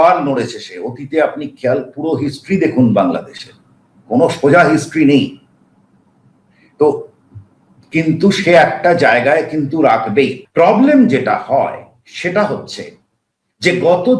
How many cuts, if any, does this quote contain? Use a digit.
1